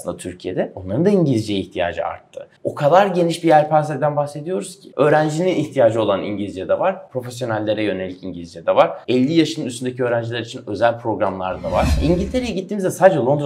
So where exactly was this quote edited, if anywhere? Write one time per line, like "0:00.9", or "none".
0:02.5
0:04.8
0:09.0
0:12.0